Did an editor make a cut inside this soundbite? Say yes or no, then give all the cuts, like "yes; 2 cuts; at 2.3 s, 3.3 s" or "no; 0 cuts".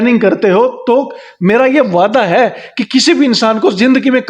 no; 0 cuts